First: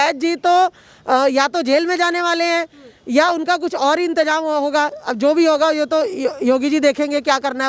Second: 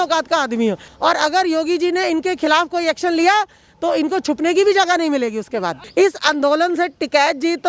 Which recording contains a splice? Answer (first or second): second